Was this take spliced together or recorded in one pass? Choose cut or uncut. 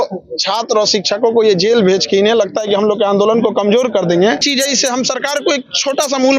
cut